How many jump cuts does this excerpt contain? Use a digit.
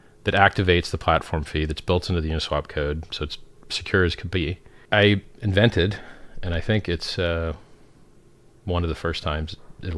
1